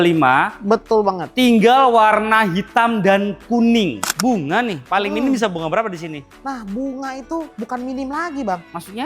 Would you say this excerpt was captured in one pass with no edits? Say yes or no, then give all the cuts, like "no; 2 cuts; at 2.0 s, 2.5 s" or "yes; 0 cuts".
no; 1 cut; at 4.0 s